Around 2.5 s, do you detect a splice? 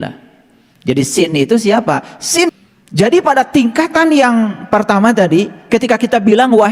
yes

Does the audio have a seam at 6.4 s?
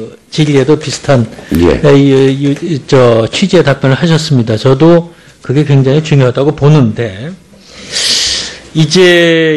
no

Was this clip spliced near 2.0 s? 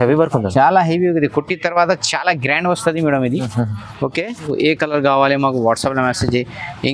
no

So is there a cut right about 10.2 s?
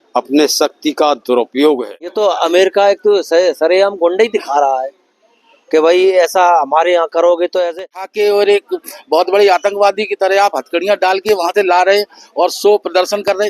no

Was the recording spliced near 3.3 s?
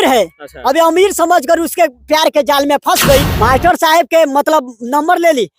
yes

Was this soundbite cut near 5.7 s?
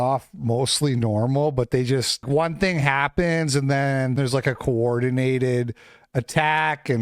no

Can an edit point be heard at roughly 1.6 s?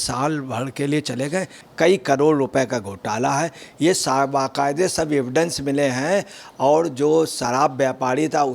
yes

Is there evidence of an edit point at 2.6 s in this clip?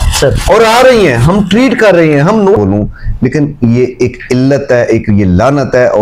yes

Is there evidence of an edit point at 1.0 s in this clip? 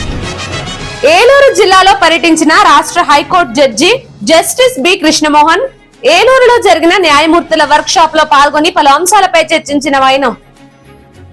yes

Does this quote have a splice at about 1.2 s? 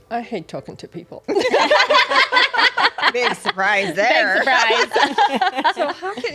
no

